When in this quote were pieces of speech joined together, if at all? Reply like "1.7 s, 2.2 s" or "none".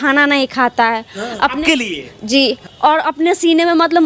2.7 s